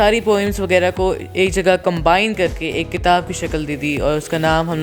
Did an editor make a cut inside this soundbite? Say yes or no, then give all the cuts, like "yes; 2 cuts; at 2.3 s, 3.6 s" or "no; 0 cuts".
no; 0 cuts